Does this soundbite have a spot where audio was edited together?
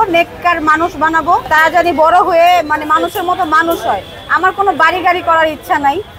no; 0 cuts

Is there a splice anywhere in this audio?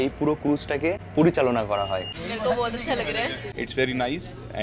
yes; 3 cuts; at 1.0 s, 2.2 s, 3.5 s

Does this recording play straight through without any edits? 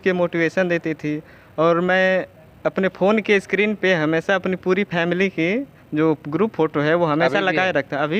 yes; 0 cuts

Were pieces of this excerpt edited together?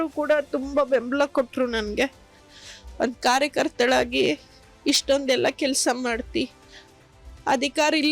yes; 1 cut; at 5.2 s

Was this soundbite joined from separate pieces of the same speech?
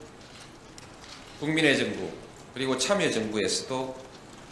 no; 0 cuts

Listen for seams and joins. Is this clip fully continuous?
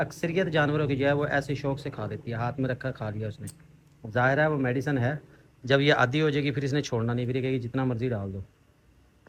yes; 0 cuts

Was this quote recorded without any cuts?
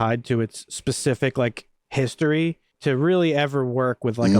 no; 1 cut; at 2.7 s

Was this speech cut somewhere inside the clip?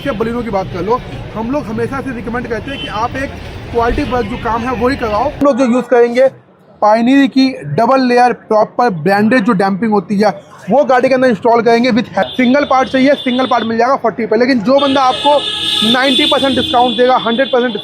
yes; 2 cuts; at 5.4 s, 12.2 s

